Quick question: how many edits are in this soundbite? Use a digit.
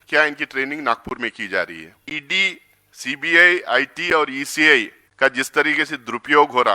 2